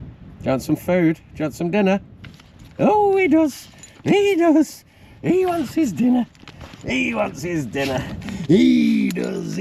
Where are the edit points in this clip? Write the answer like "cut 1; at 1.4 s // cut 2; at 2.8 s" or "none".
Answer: none